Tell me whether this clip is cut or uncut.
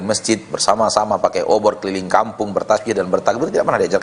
uncut